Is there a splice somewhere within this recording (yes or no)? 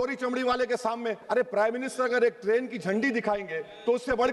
yes